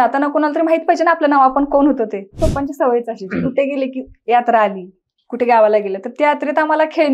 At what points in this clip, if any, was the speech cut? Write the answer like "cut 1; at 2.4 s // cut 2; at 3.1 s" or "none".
cut 1; at 2.4 s